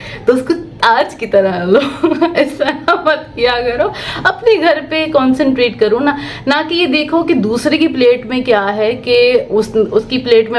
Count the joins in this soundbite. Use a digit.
0